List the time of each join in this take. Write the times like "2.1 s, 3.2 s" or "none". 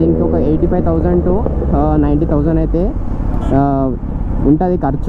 none